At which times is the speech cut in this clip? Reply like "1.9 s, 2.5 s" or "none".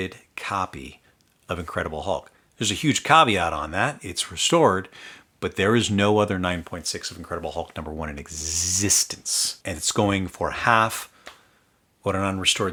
none